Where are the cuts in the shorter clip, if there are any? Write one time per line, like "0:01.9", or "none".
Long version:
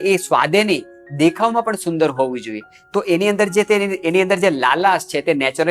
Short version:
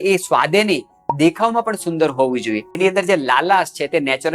0:02.7